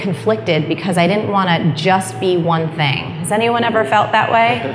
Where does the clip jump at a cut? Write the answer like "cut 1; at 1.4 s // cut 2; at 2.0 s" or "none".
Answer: none